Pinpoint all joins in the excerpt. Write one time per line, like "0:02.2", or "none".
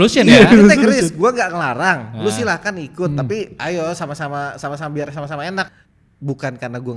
0:05.7